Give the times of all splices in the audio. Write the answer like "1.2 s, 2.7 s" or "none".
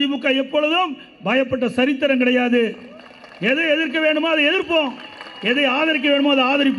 none